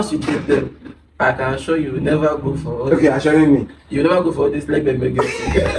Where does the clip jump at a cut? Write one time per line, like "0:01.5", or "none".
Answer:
none